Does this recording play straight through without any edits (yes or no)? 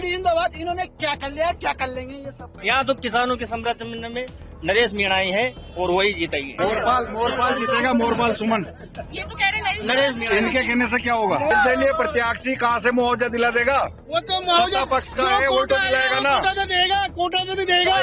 no